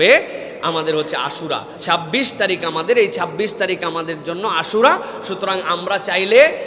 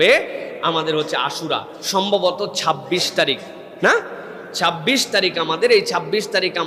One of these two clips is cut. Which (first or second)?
first